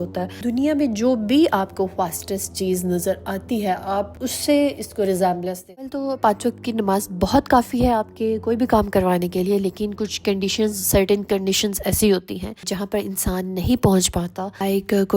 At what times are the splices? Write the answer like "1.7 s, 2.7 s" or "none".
6.0 s